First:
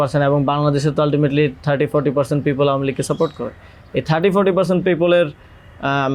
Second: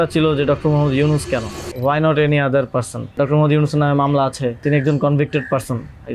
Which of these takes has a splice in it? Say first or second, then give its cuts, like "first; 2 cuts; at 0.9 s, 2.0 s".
second; 3 cuts; at 1.6 s, 3.1 s, 4.6 s